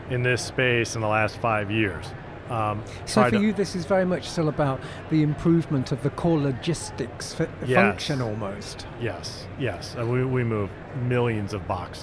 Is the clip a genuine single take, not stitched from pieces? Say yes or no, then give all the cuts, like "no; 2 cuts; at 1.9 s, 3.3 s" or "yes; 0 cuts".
yes; 0 cuts